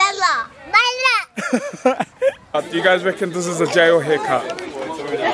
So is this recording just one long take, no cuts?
no; 1 cut; at 2.5 s

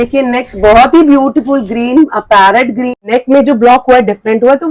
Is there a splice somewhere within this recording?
yes; 1 cut; at 3.0 s

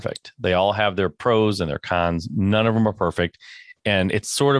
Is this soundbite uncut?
yes; 0 cuts

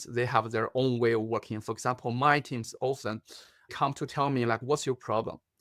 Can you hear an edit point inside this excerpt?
yes; 1 cut; at 3.7 s

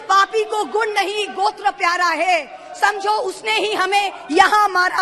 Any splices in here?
no; 0 cuts

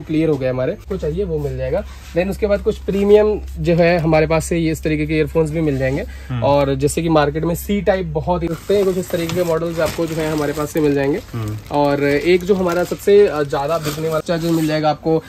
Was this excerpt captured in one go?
no; 3 cuts; at 0.9 s, 8.6 s, 14.2 s

